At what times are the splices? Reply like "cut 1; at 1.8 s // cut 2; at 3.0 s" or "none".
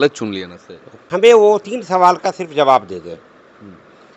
cut 1; at 1.2 s